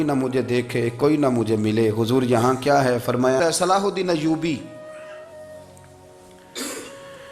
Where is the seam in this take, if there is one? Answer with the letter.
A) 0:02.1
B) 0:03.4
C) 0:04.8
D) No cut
B